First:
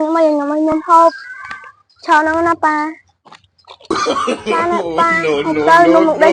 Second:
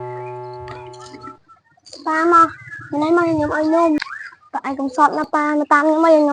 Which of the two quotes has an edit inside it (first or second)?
second